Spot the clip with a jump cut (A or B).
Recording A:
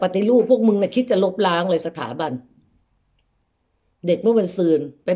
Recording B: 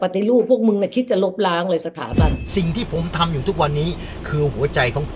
B